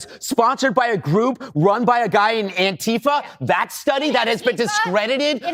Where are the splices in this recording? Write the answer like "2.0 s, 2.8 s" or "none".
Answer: none